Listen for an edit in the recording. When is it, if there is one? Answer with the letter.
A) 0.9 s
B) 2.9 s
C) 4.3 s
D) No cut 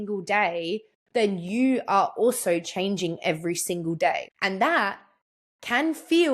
C